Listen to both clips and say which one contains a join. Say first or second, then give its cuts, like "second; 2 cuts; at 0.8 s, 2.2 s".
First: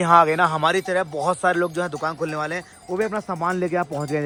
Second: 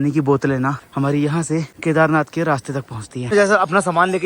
second; 3 cuts; at 0.8 s, 1.7 s, 3.3 s